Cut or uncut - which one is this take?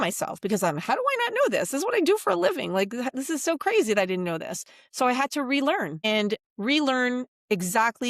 cut